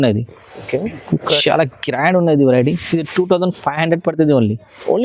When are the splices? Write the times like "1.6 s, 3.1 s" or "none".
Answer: none

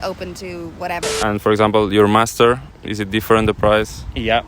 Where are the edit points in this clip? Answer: 1.1 s

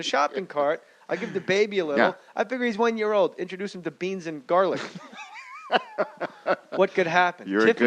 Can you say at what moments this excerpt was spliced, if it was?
5.1 s

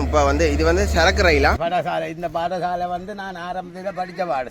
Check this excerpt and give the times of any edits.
1.6 s

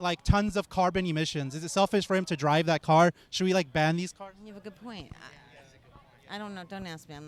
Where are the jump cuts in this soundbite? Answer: none

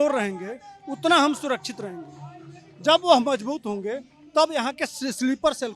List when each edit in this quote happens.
none

